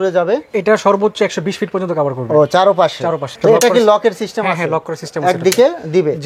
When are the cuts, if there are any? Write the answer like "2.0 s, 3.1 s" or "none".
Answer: none